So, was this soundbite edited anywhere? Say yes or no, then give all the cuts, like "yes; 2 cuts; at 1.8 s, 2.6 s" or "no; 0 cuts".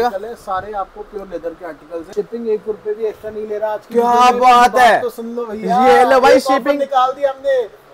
yes; 1 cut; at 2.1 s